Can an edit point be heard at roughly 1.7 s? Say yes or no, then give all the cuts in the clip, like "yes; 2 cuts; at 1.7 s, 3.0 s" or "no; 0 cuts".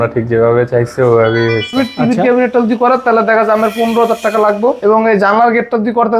yes; 2 cuts; at 1.7 s, 4.8 s